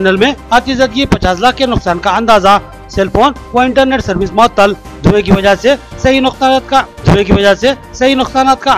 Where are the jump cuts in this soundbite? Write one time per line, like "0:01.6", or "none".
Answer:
none